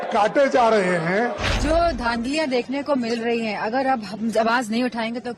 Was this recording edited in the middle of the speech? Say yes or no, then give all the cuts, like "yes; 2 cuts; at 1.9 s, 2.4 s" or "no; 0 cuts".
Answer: yes; 1 cut; at 1.5 s